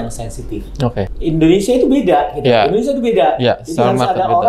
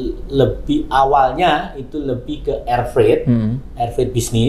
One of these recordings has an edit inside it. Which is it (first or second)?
first